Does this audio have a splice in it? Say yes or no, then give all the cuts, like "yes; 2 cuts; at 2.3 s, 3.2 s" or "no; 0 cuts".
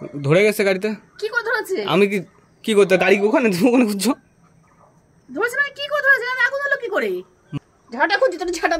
yes; 1 cut; at 7.4 s